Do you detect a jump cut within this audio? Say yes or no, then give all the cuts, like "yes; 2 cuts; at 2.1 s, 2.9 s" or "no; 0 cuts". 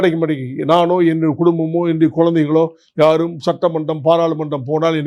no; 0 cuts